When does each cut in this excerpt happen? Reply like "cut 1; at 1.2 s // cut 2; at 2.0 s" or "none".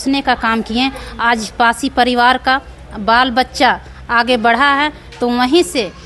none

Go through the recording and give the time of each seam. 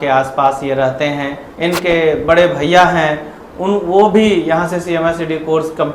cut 1; at 1.4 s

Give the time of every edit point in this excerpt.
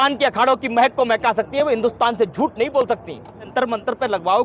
cut 1; at 3.5 s

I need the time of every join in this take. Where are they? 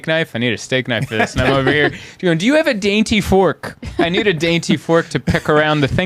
none

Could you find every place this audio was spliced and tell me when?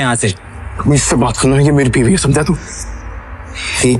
none

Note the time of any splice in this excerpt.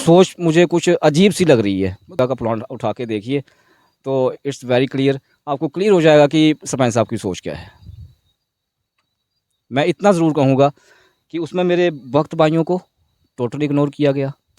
cut 1; at 2.2 s

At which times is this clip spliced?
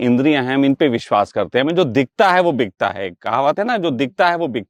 none

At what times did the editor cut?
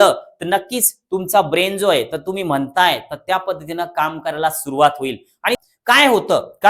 cut 1; at 5.6 s

